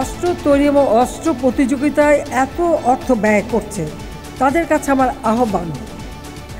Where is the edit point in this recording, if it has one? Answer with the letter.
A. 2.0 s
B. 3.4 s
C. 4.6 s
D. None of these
D